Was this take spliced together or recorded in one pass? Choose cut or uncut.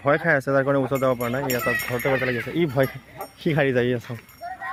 uncut